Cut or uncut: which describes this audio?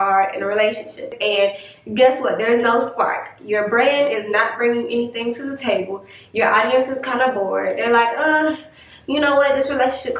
cut